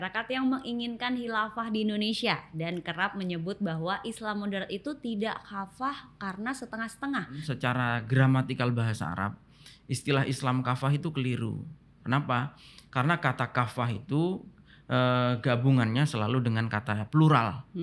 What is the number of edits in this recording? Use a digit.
1